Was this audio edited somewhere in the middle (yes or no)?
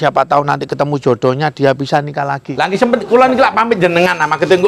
yes